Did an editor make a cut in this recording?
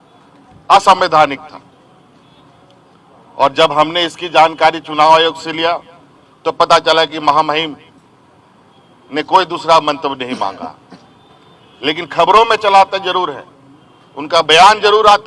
no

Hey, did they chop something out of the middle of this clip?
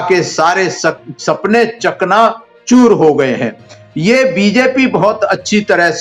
no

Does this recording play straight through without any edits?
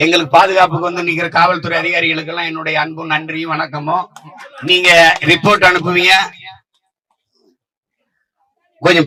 yes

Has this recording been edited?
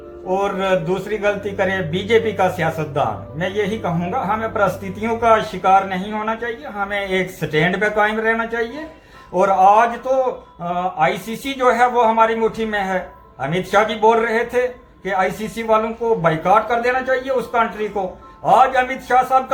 no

